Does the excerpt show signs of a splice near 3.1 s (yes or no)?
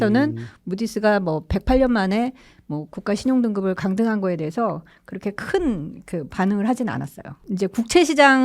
no